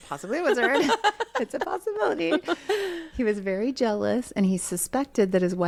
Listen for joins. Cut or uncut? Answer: uncut